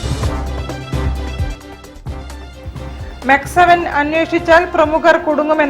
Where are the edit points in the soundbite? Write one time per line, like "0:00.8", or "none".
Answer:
none